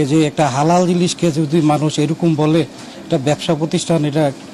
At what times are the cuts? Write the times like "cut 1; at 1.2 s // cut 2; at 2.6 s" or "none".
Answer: none